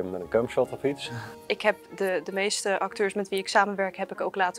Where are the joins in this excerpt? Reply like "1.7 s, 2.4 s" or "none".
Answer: 1.3 s